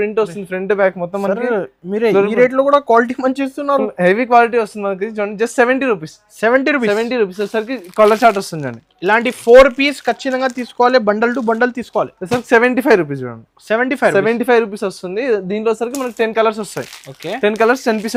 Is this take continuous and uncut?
yes; 0 cuts

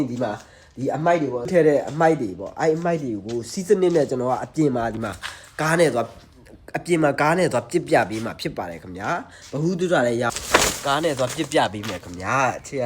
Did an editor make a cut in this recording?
yes; 2 cuts; at 1.5 s, 10.3 s

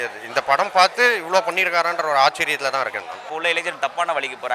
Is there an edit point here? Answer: yes; 1 cut; at 3.3 s

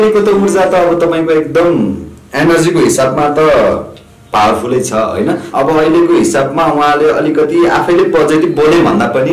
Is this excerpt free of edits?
no; 1 cut; at 5.5 s

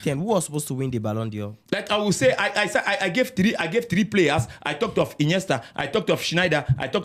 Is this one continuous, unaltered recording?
yes; 0 cuts

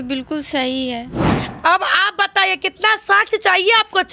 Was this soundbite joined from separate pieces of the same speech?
yes; 1 cut; at 1.2 s

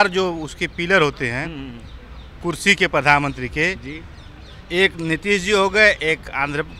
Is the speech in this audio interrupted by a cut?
no; 0 cuts

